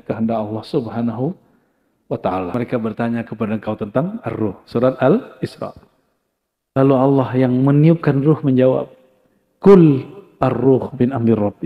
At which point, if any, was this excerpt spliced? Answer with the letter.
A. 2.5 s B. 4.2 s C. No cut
A